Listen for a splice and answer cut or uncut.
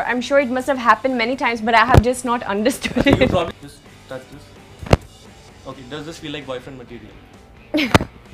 cut